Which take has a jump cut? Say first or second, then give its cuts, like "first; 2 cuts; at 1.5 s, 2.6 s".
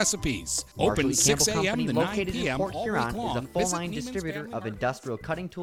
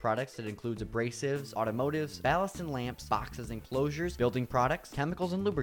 first; 1 cut; at 1.9 s